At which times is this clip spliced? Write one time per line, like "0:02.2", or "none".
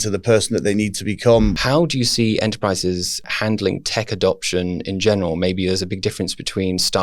0:01.5
0:03.3